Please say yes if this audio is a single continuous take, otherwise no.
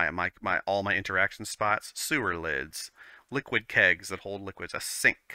yes